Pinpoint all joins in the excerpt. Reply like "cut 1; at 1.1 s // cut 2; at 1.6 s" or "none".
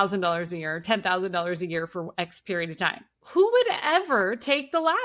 cut 1; at 3.1 s